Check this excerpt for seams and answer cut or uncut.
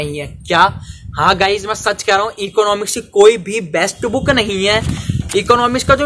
uncut